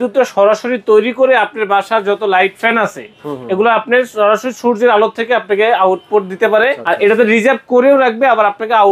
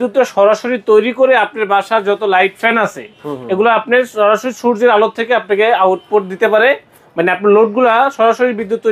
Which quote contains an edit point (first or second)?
first